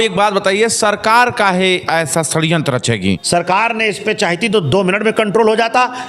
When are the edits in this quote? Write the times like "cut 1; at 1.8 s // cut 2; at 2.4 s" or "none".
cut 1; at 3.2 s